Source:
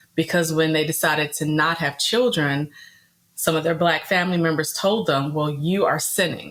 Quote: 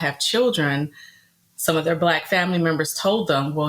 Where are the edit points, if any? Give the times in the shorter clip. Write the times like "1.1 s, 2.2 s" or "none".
none